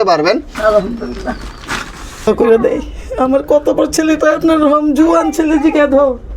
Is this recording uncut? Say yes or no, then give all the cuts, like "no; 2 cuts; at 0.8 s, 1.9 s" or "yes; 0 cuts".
no; 1 cut; at 2.3 s